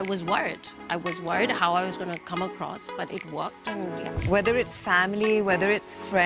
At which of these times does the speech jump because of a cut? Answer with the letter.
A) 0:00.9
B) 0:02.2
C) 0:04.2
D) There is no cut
C